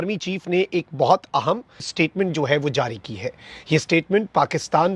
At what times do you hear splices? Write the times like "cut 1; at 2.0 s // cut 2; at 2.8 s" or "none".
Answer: cut 1; at 1.9 s